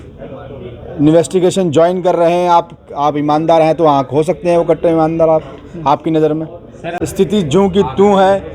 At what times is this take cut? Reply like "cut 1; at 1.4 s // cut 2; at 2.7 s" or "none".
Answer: cut 1; at 6.8 s